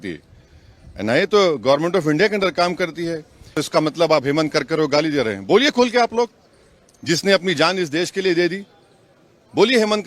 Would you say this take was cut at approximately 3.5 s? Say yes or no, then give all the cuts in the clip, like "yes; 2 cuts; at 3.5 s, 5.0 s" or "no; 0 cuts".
yes; 1 cut; at 3.5 s